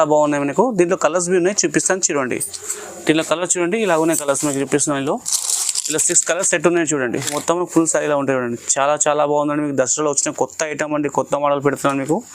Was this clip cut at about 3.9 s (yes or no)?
no